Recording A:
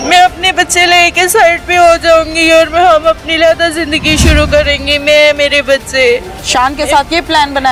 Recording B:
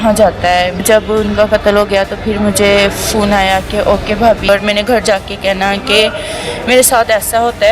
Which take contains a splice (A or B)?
B